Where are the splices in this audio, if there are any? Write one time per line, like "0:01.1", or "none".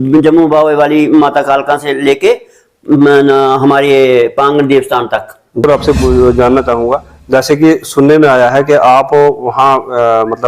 0:05.6